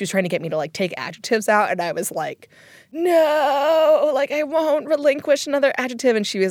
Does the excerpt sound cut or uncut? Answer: uncut